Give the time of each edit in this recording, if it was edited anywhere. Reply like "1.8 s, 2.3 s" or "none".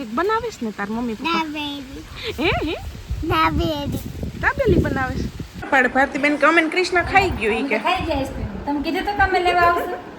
5.7 s